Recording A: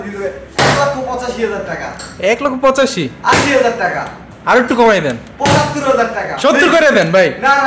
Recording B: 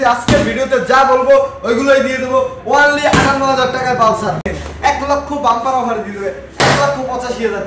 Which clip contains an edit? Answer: B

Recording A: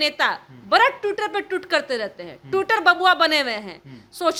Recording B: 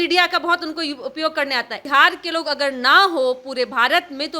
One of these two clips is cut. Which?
B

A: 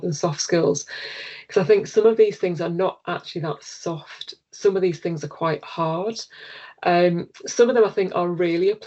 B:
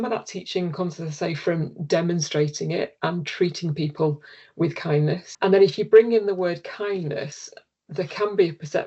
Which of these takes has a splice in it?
B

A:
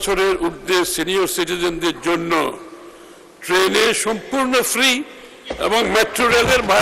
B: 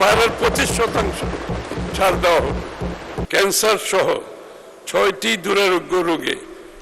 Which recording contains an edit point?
B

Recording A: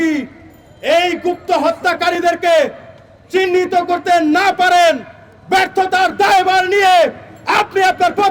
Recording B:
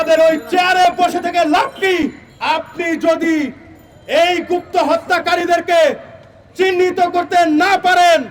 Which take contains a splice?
B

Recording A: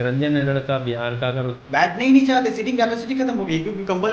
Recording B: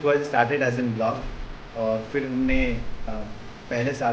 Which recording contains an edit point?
A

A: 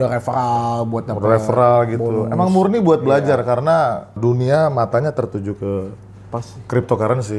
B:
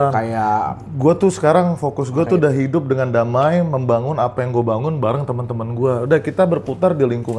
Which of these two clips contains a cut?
A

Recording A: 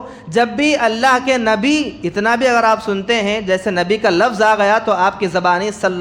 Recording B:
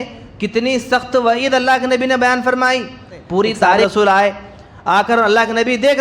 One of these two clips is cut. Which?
B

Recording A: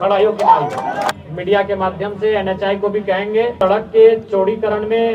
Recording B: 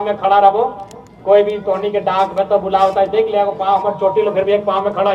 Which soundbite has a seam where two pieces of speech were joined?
A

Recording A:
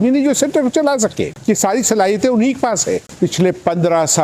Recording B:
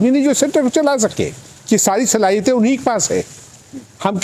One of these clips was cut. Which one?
A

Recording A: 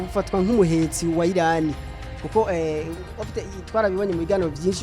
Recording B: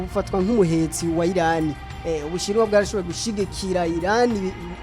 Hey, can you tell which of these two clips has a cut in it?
B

